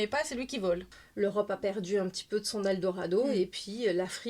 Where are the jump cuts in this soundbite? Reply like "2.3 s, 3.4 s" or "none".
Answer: 1.0 s